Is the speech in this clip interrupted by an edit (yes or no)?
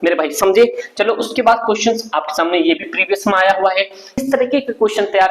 yes